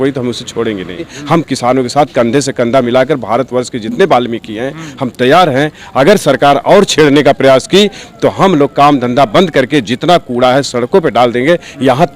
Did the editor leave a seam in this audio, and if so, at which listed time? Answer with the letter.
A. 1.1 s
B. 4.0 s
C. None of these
A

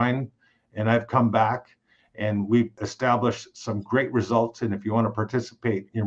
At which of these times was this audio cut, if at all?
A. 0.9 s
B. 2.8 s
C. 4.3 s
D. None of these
B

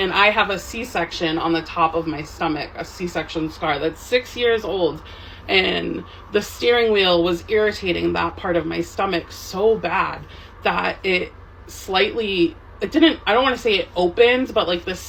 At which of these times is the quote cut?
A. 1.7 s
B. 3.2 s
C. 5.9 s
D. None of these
D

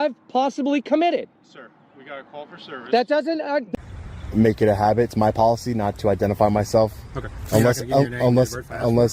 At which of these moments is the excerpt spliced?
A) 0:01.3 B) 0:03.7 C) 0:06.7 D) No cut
B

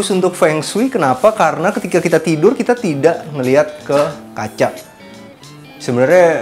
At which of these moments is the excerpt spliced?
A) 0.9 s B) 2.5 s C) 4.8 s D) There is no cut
D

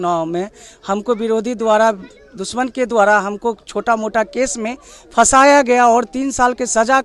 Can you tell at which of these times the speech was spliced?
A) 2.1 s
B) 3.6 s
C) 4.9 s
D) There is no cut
D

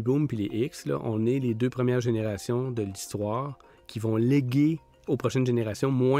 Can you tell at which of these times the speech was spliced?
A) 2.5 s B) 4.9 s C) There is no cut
B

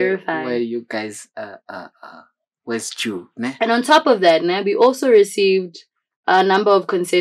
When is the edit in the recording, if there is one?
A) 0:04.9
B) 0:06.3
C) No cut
C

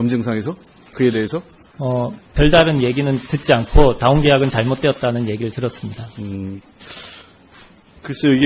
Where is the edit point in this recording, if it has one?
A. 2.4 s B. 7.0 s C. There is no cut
B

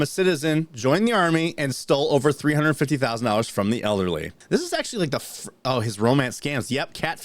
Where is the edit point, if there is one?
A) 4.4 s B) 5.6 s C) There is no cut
A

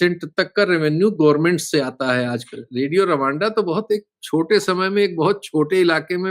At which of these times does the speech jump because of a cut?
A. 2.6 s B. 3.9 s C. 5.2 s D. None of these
A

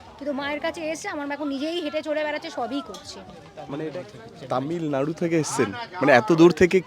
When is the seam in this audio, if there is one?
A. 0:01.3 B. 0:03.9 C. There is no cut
B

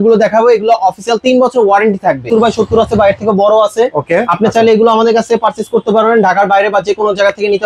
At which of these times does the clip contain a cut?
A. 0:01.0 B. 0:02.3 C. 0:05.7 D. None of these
B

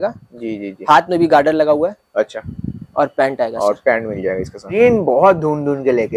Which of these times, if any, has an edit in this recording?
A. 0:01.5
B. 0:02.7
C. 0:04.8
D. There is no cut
C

